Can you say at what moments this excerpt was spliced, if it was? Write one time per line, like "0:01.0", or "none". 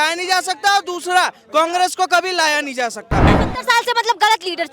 0:03.3